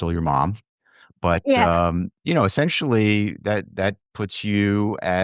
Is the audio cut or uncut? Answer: cut